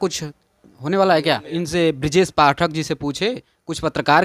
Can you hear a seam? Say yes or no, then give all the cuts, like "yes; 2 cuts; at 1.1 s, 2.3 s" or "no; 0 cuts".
yes; 1 cut; at 1.5 s